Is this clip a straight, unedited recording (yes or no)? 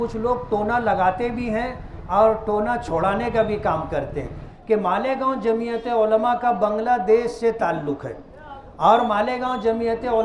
no